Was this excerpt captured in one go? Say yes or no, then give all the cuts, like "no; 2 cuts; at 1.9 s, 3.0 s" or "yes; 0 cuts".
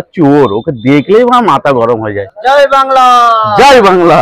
yes; 0 cuts